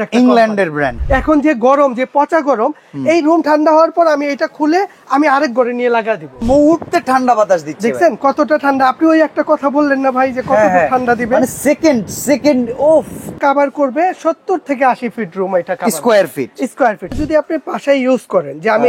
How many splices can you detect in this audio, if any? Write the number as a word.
four